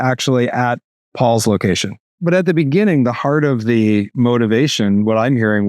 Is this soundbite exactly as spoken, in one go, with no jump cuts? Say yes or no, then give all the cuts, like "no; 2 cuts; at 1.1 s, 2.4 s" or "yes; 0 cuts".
no; 1 cut; at 2.2 s